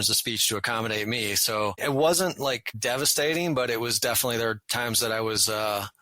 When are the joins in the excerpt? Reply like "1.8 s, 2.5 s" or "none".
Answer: 1.8 s, 2.7 s